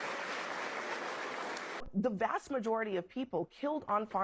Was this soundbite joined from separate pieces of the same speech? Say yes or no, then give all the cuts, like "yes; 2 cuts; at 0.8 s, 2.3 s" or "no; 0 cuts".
yes; 1 cut; at 1.9 s